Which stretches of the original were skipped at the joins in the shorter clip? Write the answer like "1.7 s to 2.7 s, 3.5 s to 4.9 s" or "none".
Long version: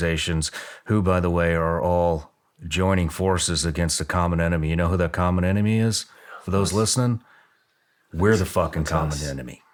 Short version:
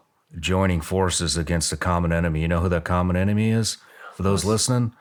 none